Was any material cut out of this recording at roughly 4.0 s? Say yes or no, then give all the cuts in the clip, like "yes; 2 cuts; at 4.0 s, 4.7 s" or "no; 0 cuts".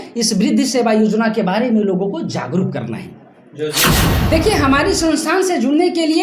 yes; 1 cut; at 4.0 s